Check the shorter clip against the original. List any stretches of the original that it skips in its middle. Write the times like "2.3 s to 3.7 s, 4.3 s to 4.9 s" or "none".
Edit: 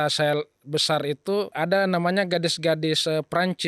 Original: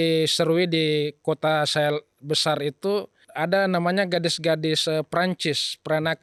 3.1 s to 3.3 s